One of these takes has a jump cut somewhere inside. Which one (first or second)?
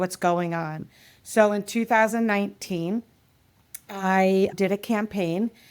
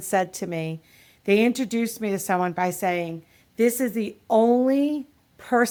first